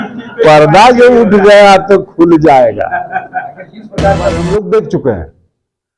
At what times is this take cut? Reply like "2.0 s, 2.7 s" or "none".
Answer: 4.4 s